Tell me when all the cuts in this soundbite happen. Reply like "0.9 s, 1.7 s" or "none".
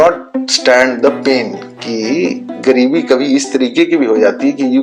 none

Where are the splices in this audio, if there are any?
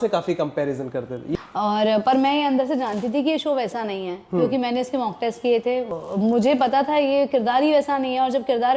1.3 s, 6.0 s

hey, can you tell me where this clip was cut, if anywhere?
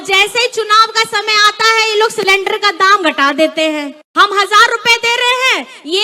4.0 s

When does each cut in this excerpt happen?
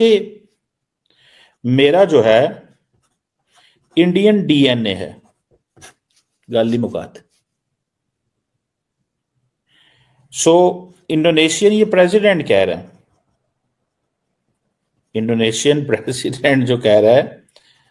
none

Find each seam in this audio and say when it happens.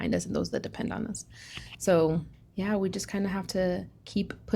2.4 s

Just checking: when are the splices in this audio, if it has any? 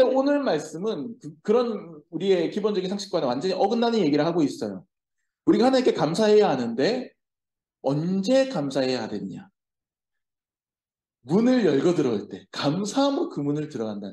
none

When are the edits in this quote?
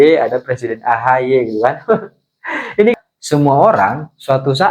2.9 s

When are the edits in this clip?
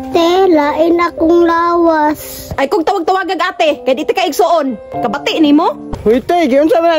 4.9 s, 5.9 s

